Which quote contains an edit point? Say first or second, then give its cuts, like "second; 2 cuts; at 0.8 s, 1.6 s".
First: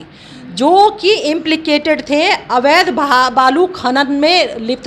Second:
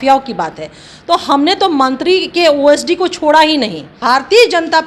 second; 1 cut; at 4.0 s